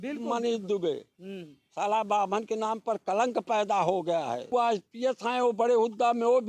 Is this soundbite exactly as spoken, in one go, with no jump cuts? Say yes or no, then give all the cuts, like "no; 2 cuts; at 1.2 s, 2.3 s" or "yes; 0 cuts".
no; 1 cut; at 4.5 s